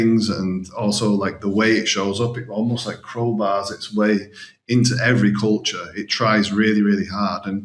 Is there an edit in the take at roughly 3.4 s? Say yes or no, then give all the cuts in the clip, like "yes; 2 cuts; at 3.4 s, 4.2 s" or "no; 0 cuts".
no; 0 cuts